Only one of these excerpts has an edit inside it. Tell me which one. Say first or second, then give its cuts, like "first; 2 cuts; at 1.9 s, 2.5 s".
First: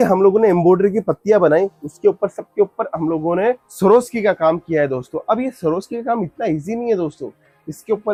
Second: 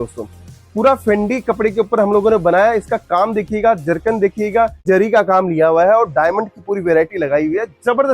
second; 1 cut; at 4.8 s